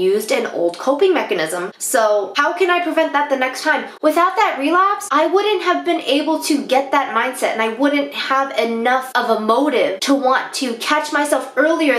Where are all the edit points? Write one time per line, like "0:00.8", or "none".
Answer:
0:02.3
0:05.0
0:09.1